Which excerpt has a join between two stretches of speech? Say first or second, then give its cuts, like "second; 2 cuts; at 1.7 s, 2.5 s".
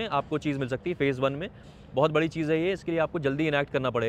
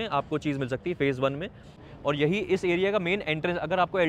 second; 1 cut; at 1.8 s